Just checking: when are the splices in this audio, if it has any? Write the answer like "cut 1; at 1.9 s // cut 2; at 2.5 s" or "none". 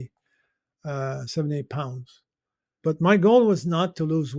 cut 1; at 2.8 s